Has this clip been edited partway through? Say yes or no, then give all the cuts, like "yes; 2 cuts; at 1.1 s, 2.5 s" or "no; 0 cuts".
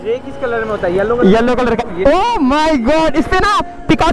yes; 1 cut; at 1.8 s